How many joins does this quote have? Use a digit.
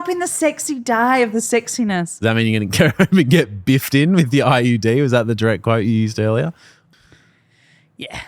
1